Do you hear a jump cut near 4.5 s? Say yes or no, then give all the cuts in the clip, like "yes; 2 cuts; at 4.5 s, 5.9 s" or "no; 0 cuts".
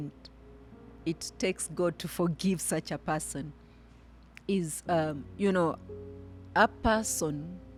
no; 0 cuts